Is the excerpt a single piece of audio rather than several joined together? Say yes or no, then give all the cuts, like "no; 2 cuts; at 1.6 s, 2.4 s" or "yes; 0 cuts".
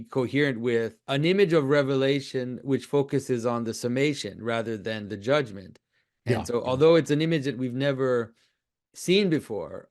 no; 1 cut; at 1.0 s